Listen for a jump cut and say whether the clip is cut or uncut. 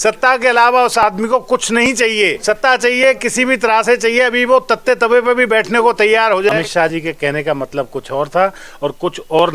cut